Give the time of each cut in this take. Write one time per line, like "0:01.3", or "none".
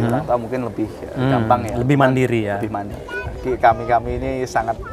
0:02.9